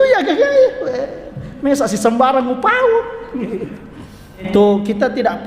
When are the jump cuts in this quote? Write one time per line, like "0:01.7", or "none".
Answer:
0:04.5